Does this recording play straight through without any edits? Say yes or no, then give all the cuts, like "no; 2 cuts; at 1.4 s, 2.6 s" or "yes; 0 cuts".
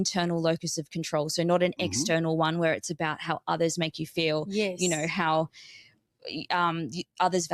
yes; 0 cuts